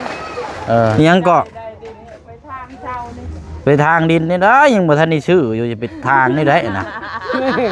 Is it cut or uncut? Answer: cut